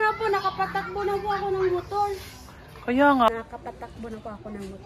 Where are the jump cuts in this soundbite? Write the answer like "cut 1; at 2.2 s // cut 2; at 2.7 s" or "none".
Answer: cut 1; at 3.3 s